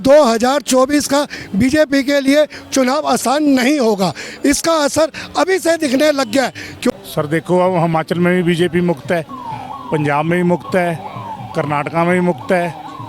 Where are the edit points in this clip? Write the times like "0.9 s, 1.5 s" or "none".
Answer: 6.9 s